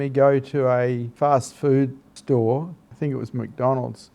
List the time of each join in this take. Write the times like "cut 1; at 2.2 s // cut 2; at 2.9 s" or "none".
cut 1; at 1.1 s // cut 2; at 2.1 s // cut 3; at 2.8 s